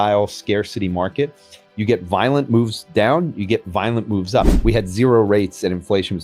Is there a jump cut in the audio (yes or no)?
yes